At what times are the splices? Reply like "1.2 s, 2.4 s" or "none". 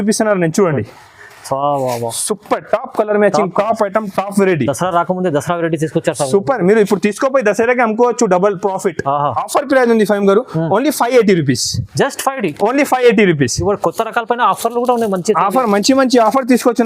9.3 s

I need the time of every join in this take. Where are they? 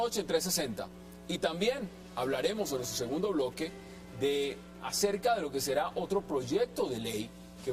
5.4 s

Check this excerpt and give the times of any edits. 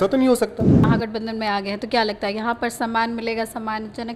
0.9 s

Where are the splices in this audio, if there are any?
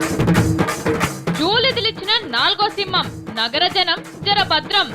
1.1 s

